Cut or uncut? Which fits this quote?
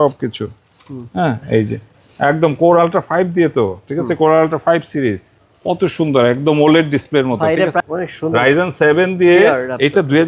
cut